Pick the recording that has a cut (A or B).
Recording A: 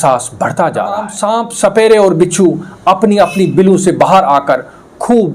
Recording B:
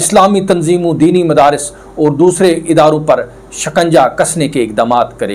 A